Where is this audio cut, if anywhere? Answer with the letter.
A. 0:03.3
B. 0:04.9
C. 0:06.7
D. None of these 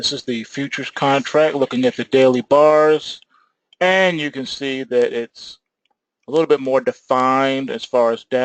A